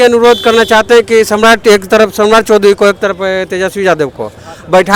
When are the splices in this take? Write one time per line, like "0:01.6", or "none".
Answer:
none